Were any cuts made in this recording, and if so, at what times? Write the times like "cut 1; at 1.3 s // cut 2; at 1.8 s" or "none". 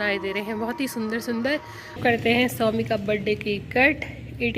cut 1; at 2.0 s